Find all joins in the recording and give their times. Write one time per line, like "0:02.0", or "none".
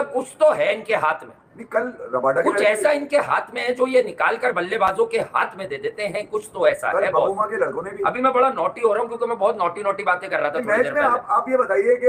none